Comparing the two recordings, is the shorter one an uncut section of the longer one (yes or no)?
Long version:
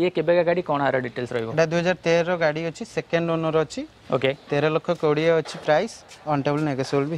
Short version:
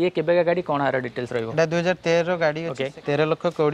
no